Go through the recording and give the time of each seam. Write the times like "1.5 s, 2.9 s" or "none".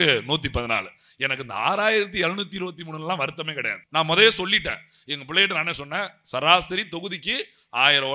3.7 s